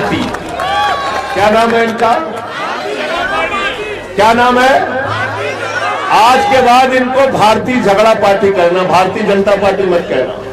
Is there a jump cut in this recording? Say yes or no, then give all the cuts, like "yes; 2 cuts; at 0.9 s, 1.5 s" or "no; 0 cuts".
yes; 1 cut; at 1.3 s